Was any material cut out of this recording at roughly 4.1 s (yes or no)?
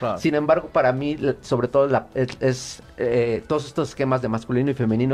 no